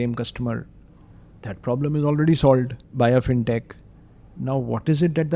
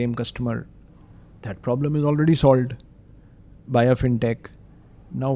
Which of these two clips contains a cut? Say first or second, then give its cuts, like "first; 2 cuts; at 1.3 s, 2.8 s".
first; 1 cut; at 2.8 s